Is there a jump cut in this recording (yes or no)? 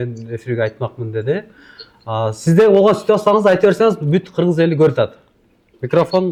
no